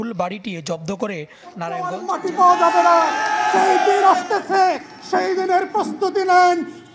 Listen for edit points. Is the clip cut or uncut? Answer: cut